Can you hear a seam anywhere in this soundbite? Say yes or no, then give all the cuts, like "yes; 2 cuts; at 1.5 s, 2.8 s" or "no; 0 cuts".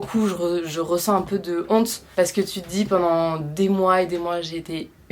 no; 0 cuts